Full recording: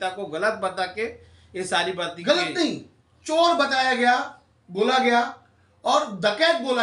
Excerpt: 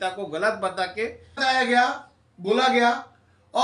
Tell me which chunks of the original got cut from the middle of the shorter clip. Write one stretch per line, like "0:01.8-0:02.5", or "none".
0:01.4-0:03.7